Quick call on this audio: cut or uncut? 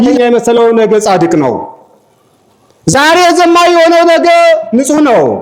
uncut